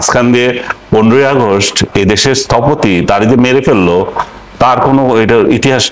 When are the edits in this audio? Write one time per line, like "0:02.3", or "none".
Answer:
none